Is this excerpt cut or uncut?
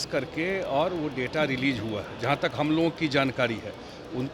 uncut